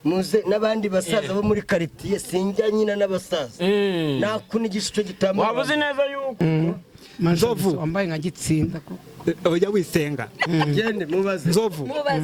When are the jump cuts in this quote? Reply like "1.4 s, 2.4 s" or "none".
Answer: 6.4 s

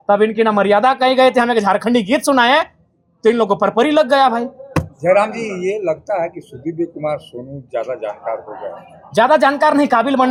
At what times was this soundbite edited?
none

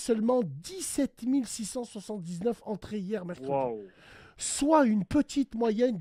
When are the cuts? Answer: none

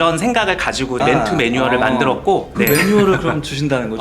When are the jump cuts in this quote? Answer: 2.5 s

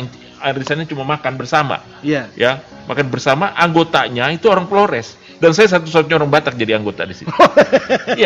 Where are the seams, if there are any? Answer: none

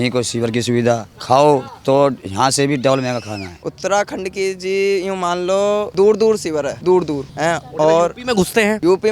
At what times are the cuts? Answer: 3.6 s

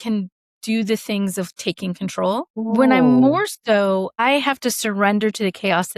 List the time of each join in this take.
2.7 s, 4.2 s

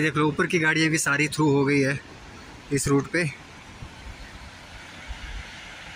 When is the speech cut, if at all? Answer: none

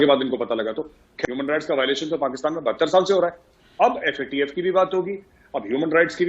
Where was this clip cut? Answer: 1.1 s

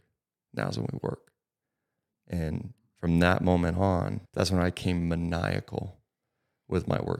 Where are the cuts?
4.2 s

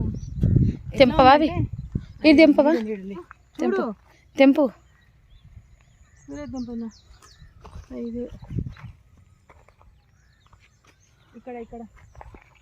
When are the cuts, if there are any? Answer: 3.4 s

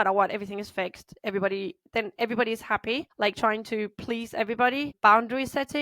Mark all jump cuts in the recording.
3.1 s, 4.9 s

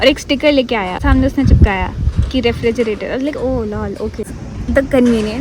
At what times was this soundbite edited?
1.0 s, 4.4 s

